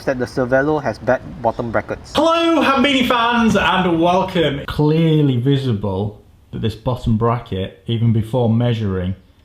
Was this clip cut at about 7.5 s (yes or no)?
no